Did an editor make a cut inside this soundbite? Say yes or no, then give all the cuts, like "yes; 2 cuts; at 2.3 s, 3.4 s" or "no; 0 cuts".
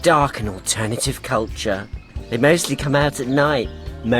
no; 0 cuts